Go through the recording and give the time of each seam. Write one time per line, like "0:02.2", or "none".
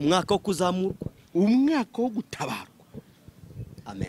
none